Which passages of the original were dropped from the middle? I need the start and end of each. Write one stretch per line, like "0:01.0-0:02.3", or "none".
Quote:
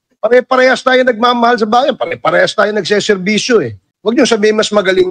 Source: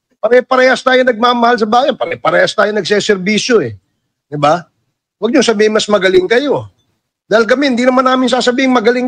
0:03.8-0:05.0